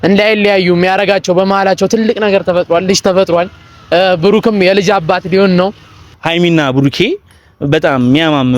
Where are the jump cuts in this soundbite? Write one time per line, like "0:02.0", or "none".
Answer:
0:06.1